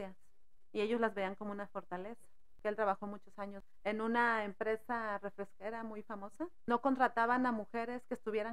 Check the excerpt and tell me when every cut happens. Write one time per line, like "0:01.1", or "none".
0:02.5
0:03.7
0:06.6